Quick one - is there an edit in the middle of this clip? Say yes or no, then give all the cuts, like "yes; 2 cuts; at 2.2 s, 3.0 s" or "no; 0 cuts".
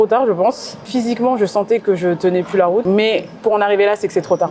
yes; 2 cuts; at 0.9 s, 2.8 s